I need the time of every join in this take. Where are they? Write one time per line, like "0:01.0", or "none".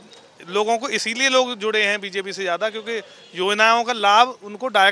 none